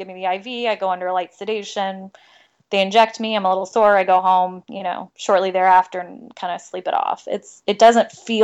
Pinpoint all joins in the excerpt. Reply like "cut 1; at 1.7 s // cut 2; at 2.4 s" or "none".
none